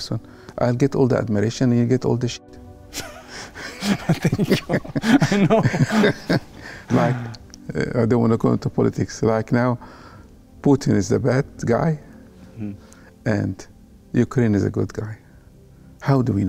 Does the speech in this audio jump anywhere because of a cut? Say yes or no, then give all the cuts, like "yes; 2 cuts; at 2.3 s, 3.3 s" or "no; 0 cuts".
no; 0 cuts